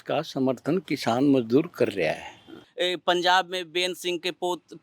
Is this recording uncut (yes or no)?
no